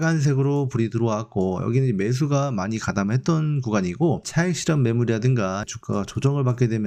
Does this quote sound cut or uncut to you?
uncut